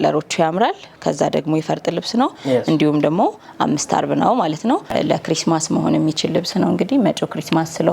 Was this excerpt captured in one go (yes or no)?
no